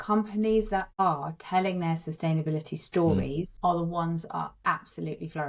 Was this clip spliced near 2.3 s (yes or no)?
no